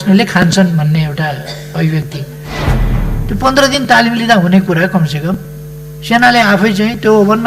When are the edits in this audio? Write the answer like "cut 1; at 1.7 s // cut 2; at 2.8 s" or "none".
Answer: cut 1; at 2.8 s

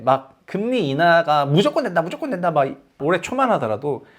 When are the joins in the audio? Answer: cut 1; at 3.0 s

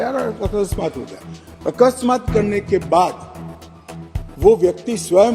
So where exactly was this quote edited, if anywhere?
none

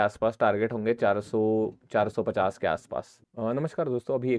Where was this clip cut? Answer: cut 1; at 3.3 s

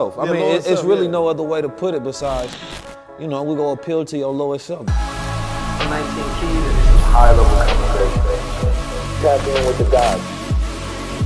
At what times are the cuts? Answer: cut 1; at 4.9 s

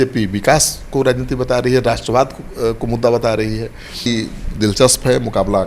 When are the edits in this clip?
cut 1; at 4.1 s

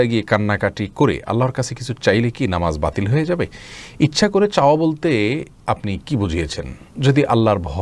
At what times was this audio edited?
none

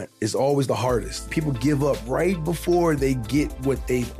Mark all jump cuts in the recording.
cut 1; at 1.3 s

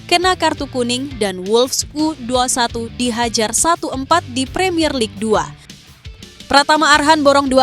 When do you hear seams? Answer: cut 1; at 5.9 s

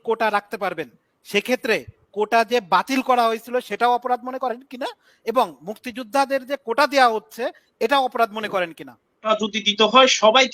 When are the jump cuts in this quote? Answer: cut 1; at 9.3 s

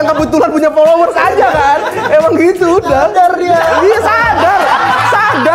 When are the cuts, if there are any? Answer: none

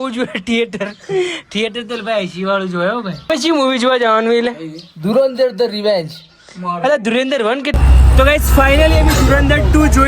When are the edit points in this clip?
cut 1; at 3.3 s // cut 2; at 7.7 s

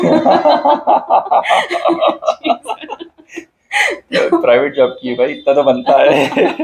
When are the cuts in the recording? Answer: none

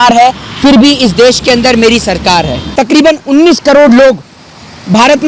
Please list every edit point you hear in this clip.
cut 1; at 2.7 s

